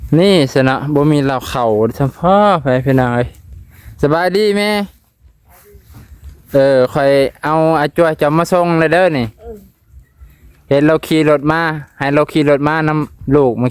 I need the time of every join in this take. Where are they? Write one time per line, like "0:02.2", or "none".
none